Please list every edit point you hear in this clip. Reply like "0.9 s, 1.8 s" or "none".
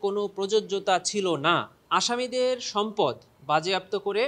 1.8 s